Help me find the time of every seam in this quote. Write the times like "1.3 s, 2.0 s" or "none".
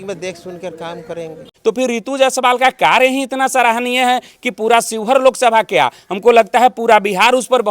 1.5 s

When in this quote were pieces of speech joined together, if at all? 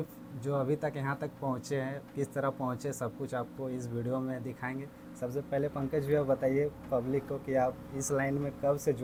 none

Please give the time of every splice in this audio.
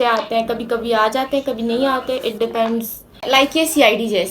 3.2 s

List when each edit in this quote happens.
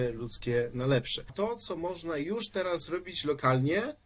1.2 s

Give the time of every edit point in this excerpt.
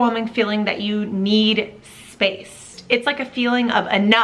2.7 s

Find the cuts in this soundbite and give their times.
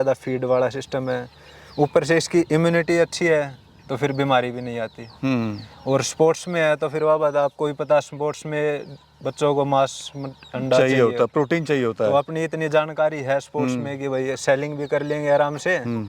none

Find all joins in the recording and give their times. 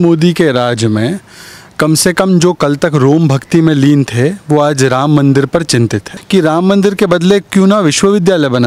6.1 s

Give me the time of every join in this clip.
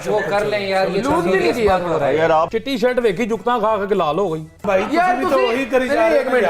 2.5 s, 4.6 s

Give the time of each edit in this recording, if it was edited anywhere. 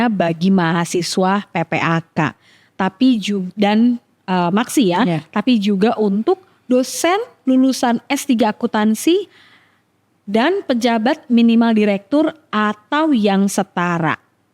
none

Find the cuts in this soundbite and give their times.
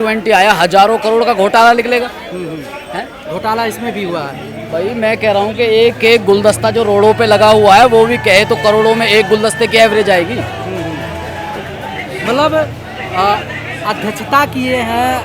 none

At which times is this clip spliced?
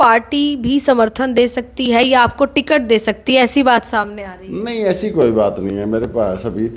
none

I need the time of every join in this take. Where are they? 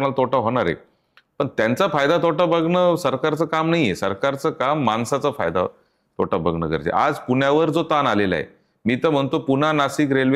none

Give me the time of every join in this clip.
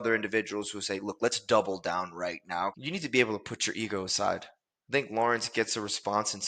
2.8 s

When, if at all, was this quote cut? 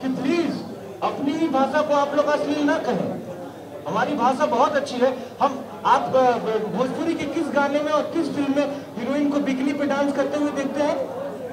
none

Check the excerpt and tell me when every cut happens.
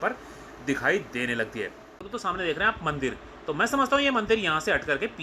2.1 s

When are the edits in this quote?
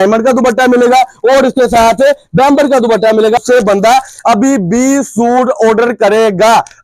3.4 s

